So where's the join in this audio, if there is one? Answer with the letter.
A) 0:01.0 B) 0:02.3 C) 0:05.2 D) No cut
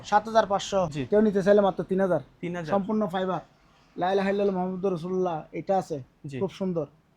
A